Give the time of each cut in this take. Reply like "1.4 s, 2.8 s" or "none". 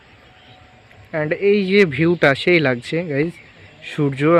none